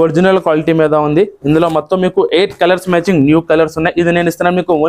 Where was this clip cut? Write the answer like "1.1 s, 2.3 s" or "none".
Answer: none